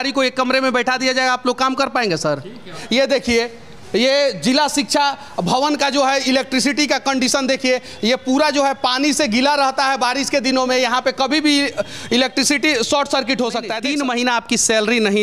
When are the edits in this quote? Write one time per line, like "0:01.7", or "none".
0:02.8
0:13.8